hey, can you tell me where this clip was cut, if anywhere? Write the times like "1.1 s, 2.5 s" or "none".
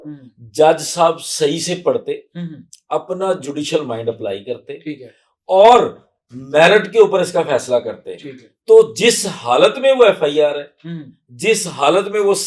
none